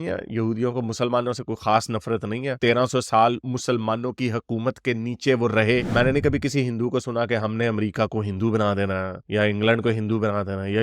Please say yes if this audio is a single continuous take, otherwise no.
no